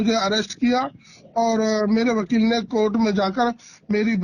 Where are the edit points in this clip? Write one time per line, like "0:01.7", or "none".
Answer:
none